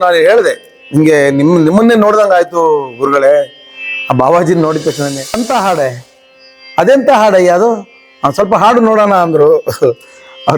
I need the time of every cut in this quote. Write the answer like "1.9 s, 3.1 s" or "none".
5.3 s

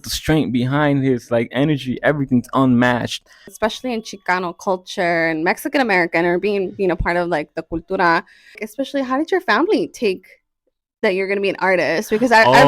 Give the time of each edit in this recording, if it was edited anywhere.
3.4 s, 8.6 s

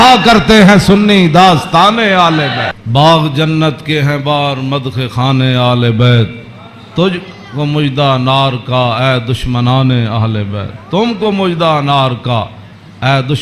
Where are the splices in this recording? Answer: 2.8 s

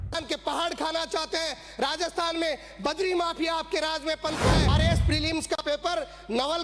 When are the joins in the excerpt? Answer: 4.7 s

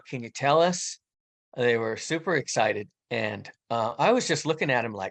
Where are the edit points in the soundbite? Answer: 2.9 s

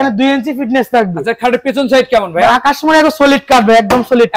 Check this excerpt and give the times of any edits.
none

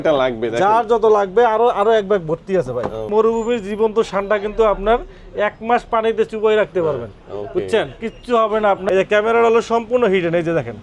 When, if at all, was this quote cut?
3.1 s, 8.8 s

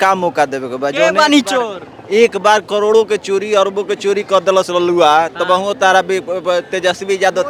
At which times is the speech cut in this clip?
none

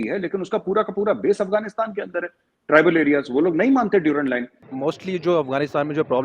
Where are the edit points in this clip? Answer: 4.6 s

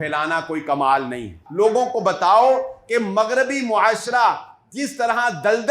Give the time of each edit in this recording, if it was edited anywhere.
1.4 s

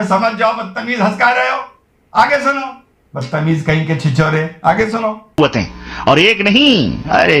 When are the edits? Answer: 5.3 s

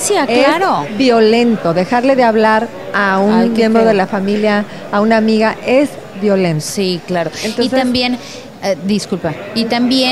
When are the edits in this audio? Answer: 1.9 s

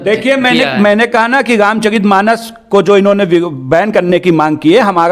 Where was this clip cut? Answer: none

